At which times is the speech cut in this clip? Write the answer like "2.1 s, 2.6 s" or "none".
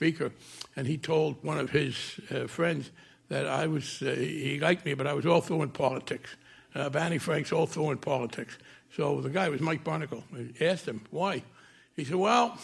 1.4 s, 4.4 s